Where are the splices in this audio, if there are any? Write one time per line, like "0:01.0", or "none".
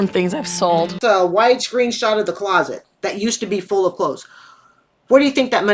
0:01.0